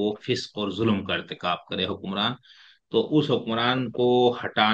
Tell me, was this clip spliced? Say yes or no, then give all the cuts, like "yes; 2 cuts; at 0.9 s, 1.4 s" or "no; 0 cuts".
no; 0 cuts